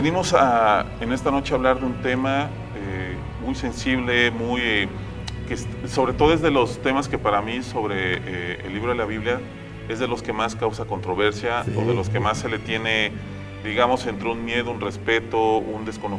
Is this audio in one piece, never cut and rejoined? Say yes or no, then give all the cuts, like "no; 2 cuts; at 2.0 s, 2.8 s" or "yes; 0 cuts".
yes; 0 cuts